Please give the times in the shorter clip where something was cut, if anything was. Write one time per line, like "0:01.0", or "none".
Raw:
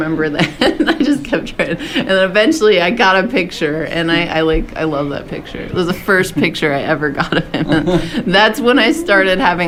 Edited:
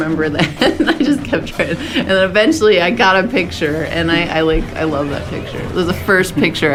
none